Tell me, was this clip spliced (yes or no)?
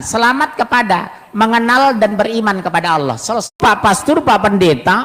yes